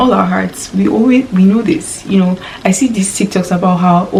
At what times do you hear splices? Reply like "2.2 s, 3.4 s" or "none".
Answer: none